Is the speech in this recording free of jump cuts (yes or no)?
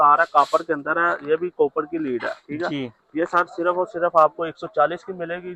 yes